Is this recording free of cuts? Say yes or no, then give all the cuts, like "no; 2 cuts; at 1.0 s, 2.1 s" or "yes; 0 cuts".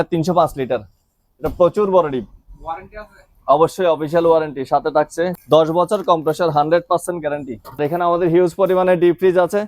no; 2 cuts; at 5.3 s, 7.8 s